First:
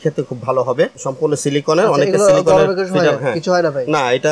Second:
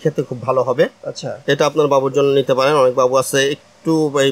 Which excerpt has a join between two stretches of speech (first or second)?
first